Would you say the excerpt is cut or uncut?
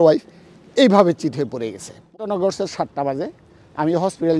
cut